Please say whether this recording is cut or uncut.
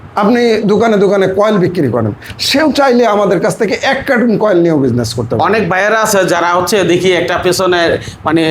uncut